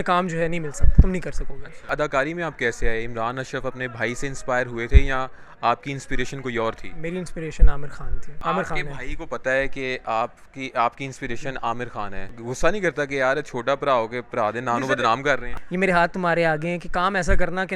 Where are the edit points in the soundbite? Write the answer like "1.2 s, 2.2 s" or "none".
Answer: 1.8 s, 8.3 s, 12.3 s, 15.5 s